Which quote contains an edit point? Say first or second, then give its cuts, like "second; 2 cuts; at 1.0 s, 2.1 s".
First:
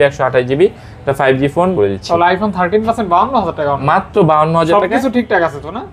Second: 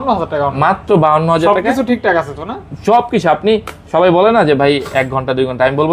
first; 1 cut; at 1.7 s